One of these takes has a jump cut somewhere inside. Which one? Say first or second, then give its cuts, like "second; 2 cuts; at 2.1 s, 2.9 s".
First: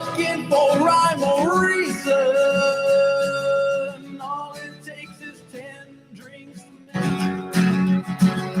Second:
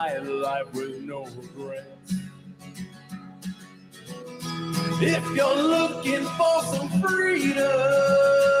first; 1 cut; at 7.1 s